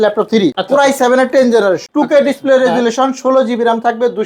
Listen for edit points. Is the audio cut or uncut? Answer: uncut